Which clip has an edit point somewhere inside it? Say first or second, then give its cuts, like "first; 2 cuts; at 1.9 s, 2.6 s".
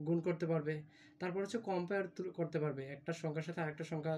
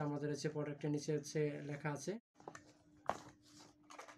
second; 1 cut; at 2.2 s